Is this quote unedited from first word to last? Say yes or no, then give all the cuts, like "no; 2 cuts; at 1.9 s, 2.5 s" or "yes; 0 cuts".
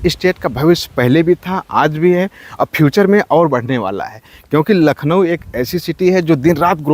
yes; 0 cuts